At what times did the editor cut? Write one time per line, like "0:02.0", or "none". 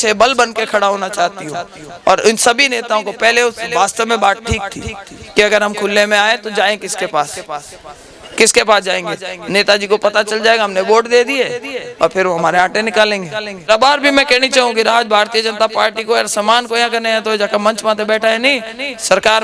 0:13.7